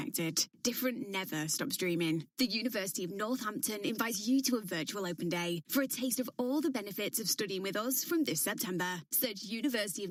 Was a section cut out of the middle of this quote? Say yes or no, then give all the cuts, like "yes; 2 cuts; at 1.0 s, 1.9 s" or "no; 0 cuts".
no; 0 cuts